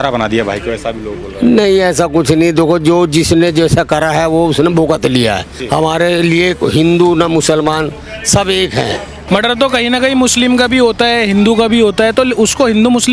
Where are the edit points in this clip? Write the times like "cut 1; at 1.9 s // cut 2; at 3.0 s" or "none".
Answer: cut 1; at 5.5 s // cut 2; at 9.2 s

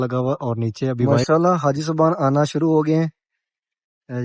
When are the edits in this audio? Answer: cut 1; at 1.2 s

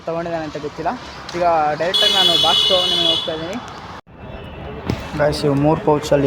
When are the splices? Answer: cut 1; at 4.2 s

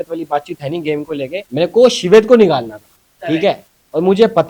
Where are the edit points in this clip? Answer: cut 1; at 1.5 s

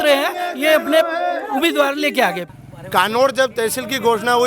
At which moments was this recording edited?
cut 1; at 2.4 s

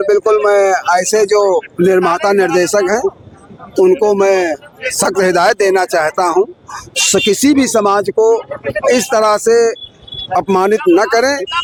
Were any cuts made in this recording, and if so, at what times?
none

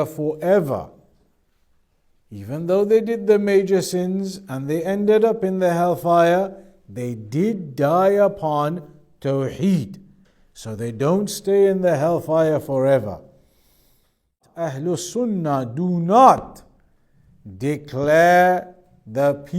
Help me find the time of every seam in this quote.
cut 1; at 14.7 s

